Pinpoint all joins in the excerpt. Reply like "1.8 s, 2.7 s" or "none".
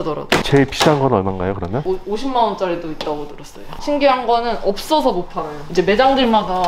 1.8 s, 3.6 s, 5.6 s